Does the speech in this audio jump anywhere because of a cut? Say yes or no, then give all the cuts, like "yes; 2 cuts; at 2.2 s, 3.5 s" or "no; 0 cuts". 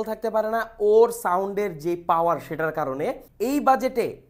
yes; 1 cut; at 3.3 s